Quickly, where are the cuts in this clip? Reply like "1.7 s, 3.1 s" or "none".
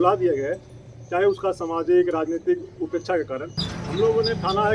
3.6 s